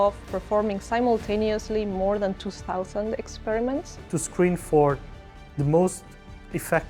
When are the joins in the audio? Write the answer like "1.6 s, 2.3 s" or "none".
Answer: none

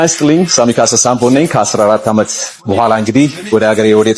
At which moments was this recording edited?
none

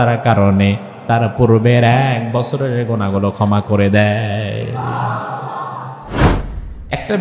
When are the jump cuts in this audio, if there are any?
6.2 s

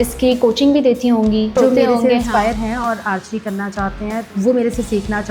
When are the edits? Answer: 1.6 s, 4.3 s

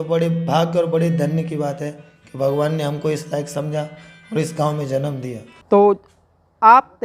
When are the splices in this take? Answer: 5.6 s

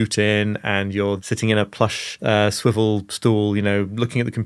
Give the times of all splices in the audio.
1.2 s, 2.2 s

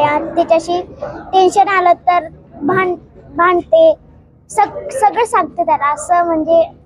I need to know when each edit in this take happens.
none

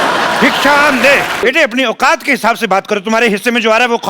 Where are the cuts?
1.4 s

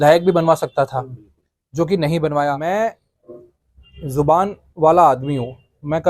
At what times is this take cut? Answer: 2.6 s

